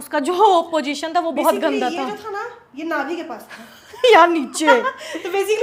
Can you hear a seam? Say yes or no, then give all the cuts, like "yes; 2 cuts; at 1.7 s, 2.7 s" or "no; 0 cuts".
no; 0 cuts